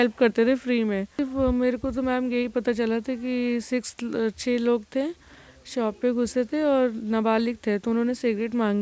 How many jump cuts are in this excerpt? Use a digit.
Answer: 1